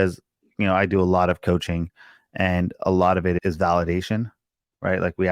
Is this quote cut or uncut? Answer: cut